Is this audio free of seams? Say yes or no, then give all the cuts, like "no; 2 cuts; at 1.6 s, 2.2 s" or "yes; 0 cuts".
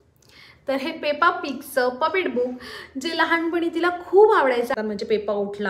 no; 1 cut; at 4.7 s